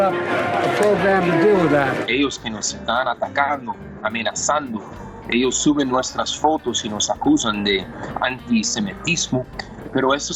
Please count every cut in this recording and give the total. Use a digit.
1